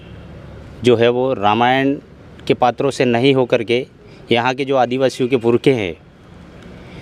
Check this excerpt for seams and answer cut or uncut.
uncut